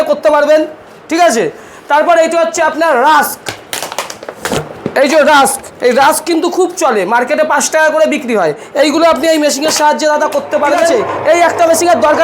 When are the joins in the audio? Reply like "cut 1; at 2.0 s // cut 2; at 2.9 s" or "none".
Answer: cut 1; at 10.9 s